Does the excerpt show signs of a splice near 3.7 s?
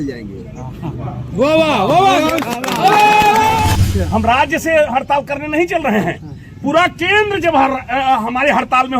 yes; 1 cut; at 3.7 s

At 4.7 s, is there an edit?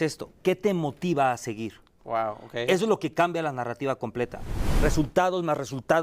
yes; 1 cut; at 4.7 s

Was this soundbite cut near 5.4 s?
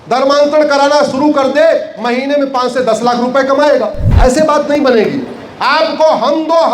no; 1 cut; at 4.0 s

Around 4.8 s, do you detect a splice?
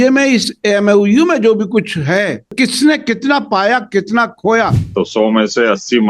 yes; 2 cuts; at 2.5 s, 4.8 s

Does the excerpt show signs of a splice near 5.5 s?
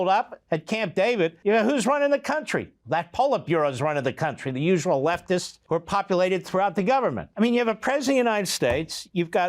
yes; 3 cuts; at 1.4 s, 5.5 s, 7.2 s

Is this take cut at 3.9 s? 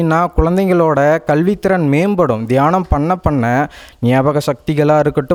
no; 0 cuts

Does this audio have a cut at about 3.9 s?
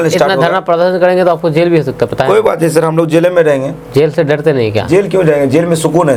no; 0 cuts

